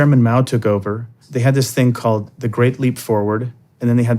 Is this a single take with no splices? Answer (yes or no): no